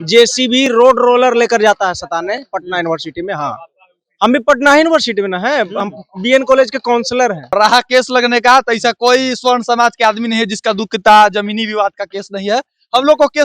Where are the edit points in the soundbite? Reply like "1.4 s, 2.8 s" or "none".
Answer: 7.5 s